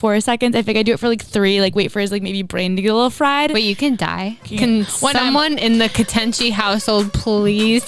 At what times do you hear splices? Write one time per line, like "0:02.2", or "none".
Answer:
0:04.4